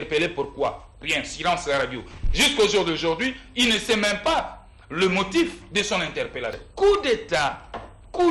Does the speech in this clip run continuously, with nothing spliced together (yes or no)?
no